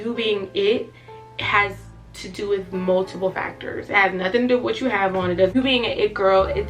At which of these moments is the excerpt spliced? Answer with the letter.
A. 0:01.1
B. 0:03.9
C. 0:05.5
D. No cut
C